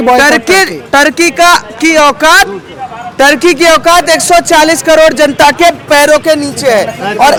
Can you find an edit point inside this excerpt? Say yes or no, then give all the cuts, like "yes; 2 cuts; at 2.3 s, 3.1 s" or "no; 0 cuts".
no; 0 cuts